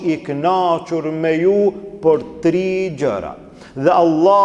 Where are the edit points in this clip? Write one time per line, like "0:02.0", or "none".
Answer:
none